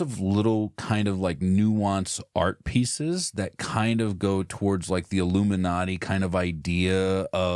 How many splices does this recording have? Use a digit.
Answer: 0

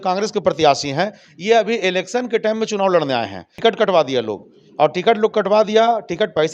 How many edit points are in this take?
1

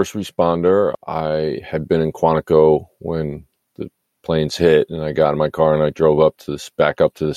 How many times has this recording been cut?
1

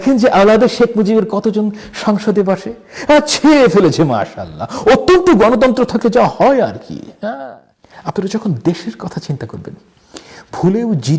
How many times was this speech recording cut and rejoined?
1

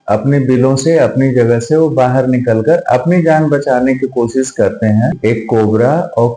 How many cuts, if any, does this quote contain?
1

